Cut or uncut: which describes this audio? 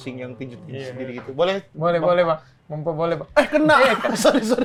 uncut